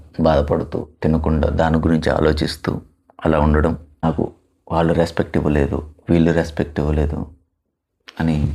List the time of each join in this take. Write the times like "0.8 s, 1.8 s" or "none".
4.0 s